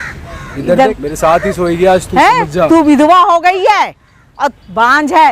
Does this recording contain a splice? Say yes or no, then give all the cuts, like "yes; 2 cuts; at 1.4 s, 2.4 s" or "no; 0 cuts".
yes; 1 cut; at 0.9 s